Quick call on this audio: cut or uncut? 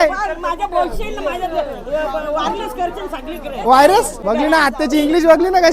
cut